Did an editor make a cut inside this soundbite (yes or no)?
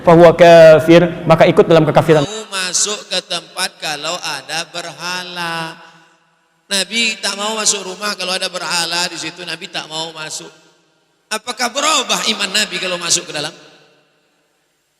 yes